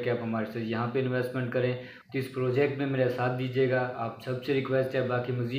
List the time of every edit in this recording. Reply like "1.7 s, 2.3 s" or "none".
1.9 s